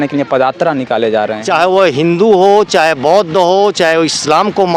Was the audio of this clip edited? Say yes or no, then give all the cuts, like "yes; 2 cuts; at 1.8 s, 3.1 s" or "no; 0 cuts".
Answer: yes; 1 cut; at 1.4 s